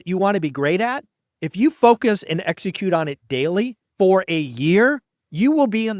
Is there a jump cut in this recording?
no; 0 cuts

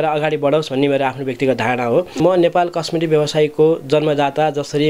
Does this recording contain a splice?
yes; 1 cut; at 2.2 s

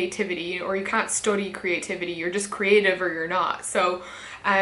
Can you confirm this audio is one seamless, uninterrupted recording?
yes; 0 cuts

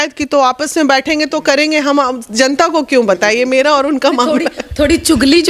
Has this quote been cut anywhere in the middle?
no; 0 cuts

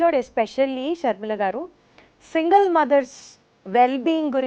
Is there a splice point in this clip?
no; 0 cuts

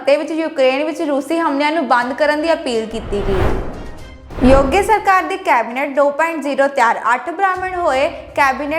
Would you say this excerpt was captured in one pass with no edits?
no; 1 cut; at 3.4 s

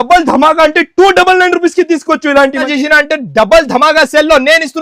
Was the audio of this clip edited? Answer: yes; 1 cut; at 2.7 s

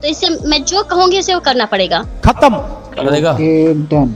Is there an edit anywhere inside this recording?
no; 0 cuts

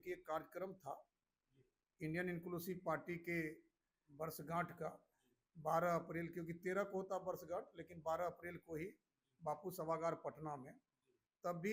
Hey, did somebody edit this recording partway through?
no; 0 cuts

